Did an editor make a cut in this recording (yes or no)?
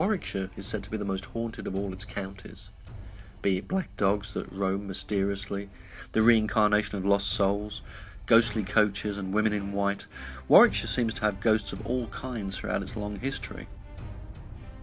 no